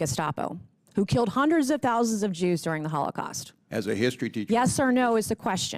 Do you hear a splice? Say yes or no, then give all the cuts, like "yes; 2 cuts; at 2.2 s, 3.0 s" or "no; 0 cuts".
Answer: no; 0 cuts